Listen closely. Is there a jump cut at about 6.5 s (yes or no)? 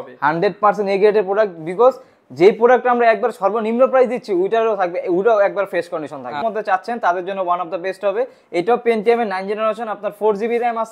yes